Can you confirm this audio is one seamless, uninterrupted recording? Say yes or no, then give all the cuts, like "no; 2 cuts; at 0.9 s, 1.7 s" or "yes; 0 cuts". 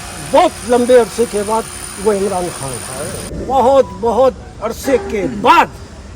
no; 1 cut; at 3.3 s